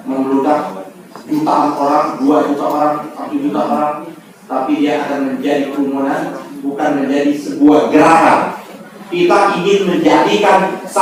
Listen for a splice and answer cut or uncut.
uncut